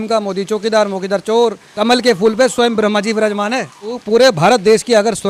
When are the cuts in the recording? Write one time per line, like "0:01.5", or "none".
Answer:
0:01.7
0:04.0